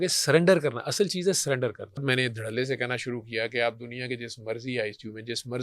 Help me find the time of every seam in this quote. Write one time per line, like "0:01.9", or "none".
0:02.0